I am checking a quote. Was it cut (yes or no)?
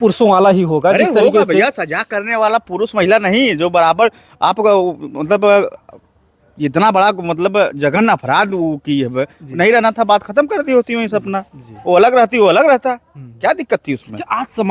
no